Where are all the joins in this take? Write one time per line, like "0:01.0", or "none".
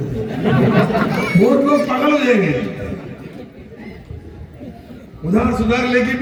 none